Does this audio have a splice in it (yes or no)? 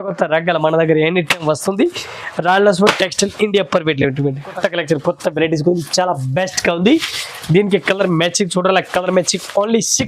yes